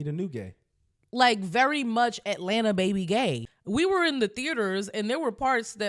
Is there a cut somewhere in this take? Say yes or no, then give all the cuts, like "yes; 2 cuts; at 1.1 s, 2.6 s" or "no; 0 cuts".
yes; 1 cut; at 3.4 s